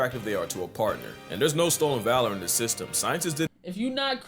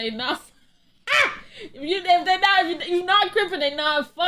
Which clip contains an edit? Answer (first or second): first